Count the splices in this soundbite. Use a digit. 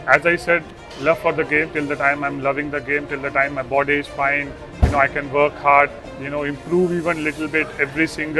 0